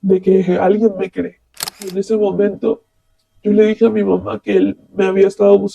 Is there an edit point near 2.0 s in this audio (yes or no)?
yes